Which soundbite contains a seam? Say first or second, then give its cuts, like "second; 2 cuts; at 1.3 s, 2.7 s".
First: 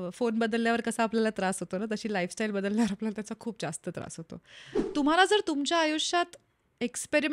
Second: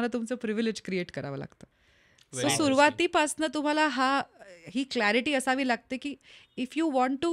first; 1 cut; at 4.8 s